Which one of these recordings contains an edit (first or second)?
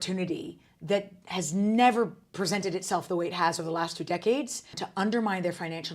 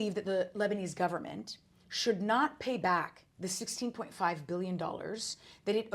first